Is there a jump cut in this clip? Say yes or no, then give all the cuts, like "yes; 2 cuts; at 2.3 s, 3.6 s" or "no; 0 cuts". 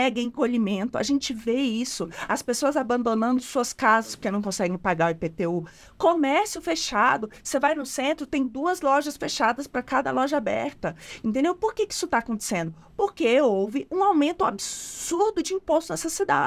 no; 0 cuts